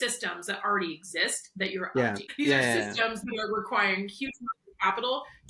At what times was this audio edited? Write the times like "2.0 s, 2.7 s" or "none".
2.3 s